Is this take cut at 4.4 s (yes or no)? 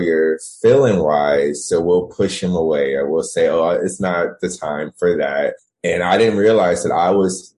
no